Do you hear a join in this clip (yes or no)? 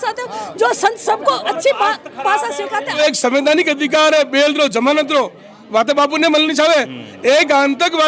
yes